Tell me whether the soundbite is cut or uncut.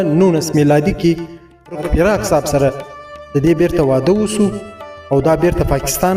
cut